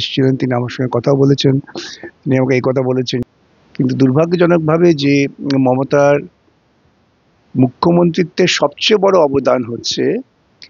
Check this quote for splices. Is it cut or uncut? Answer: cut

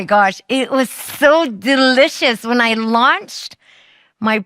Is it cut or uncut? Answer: uncut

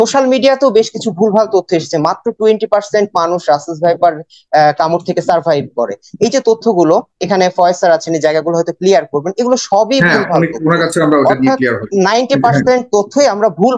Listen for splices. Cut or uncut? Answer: uncut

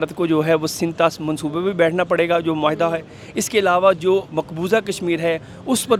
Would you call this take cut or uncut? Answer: uncut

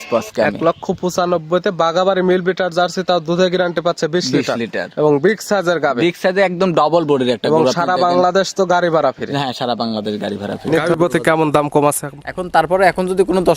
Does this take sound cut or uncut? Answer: cut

